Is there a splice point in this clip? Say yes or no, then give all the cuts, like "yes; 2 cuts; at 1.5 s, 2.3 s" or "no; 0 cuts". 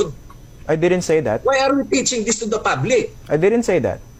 no; 0 cuts